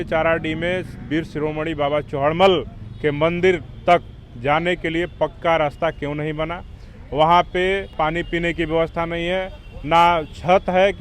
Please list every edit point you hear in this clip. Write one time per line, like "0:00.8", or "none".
0:07.9